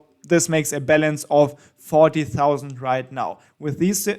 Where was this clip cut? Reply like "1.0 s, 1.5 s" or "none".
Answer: none